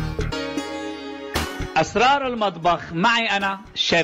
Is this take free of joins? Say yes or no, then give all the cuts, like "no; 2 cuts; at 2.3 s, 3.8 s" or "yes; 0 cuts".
no; 1 cut; at 0.9 s